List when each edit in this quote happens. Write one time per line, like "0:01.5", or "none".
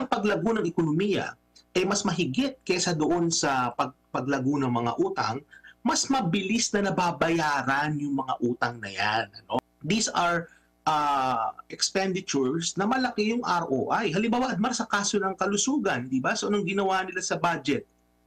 0:09.6